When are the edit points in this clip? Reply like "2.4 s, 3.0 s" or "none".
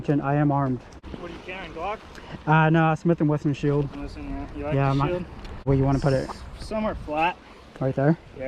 1.0 s, 5.7 s